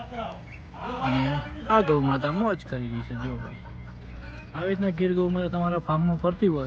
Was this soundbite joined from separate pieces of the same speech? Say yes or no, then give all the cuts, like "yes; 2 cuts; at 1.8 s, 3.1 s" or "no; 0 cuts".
no; 0 cuts